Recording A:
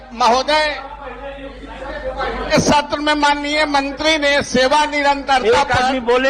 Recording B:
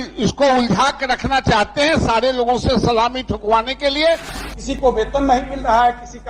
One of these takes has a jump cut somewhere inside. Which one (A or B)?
B